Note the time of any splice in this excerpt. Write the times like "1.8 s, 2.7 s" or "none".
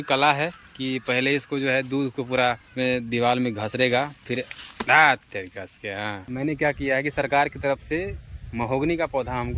2.7 s, 6.2 s

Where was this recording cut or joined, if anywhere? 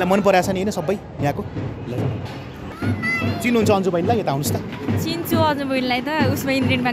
none

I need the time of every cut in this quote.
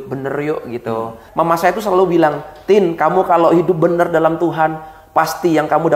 1.2 s

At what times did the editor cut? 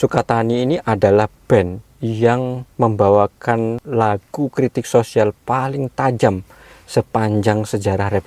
1.9 s, 2.6 s, 3.8 s

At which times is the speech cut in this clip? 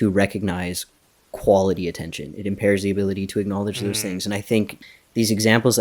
4.8 s

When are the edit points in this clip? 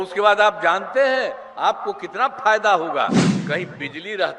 3.3 s

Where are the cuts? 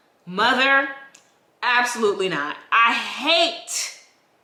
none

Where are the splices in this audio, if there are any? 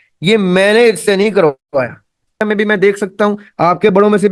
2.4 s

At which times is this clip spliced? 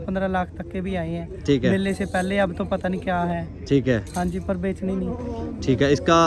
none

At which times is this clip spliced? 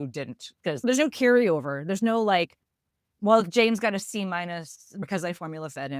5.0 s

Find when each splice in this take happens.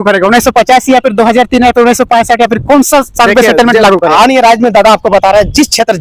none

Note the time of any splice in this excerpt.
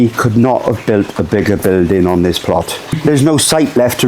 3.0 s

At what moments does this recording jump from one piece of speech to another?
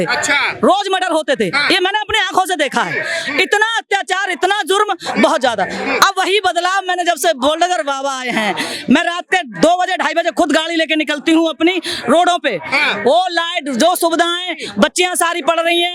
none

